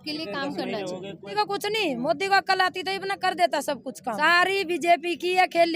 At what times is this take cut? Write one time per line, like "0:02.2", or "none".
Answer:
0:01.3
0:04.2